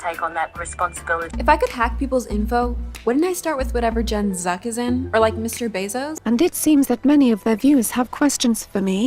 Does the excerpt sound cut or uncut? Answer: cut